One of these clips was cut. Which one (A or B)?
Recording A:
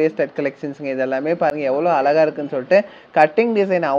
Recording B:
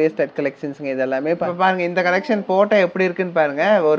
B